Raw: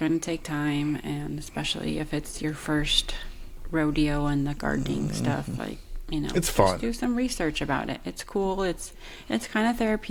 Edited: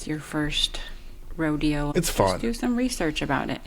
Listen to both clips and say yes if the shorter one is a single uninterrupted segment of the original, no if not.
no